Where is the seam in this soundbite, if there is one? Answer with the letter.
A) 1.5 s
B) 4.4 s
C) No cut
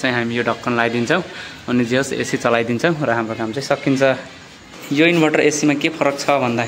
B